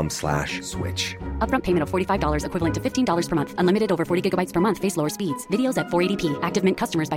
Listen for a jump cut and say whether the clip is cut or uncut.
uncut